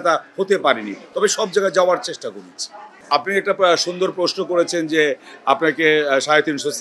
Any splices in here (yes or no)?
no